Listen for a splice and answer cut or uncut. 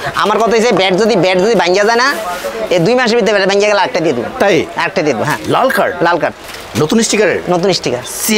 cut